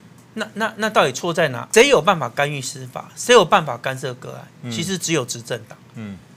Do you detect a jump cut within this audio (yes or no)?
yes